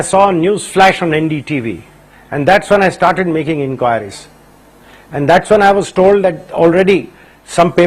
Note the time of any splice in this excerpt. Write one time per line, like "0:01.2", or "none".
0:02.7